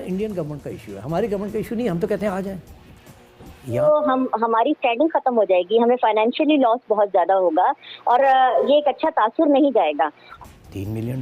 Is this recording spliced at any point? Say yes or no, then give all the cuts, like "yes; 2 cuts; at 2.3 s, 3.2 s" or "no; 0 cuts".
yes; 2 cuts; at 3.8 s, 10.2 s